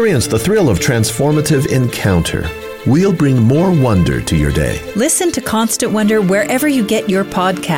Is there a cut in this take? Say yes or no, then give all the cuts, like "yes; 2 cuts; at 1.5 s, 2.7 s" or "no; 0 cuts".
no; 0 cuts